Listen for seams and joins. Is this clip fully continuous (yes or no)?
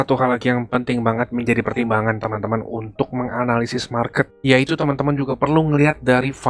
yes